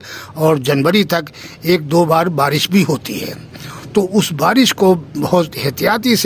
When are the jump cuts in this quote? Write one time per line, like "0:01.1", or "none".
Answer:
none